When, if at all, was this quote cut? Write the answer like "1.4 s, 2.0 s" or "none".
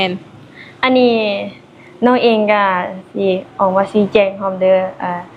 none